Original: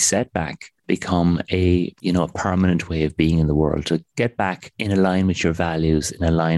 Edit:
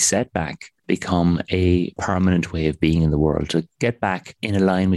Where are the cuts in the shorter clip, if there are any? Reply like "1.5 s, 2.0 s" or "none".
2.0 s